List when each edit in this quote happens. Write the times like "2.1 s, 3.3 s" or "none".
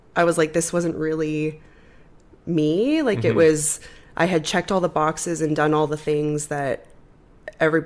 none